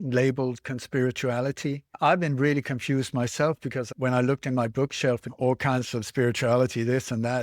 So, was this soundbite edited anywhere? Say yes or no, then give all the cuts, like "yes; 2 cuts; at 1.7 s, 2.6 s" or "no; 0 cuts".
yes; 3 cuts; at 1.9 s, 3.9 s, 5.3 s